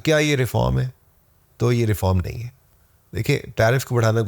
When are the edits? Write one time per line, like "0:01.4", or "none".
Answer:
none